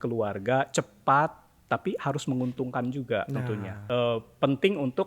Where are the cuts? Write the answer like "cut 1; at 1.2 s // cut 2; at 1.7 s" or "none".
cut 1; at 3.7 s